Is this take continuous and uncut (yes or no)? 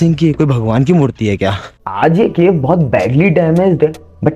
no